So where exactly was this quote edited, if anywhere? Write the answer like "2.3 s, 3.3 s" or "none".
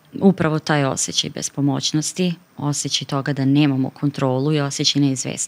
none